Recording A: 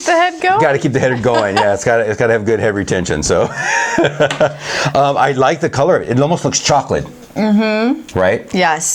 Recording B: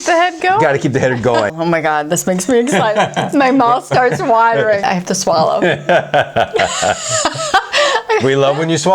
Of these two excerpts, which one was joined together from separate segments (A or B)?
B